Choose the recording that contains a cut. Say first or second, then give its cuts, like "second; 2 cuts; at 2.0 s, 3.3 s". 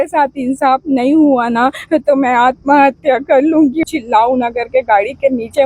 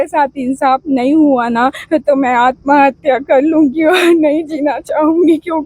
first; 1 cut; at 3.8 s